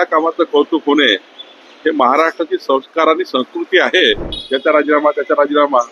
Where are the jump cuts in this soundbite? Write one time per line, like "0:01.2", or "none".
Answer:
0:04.3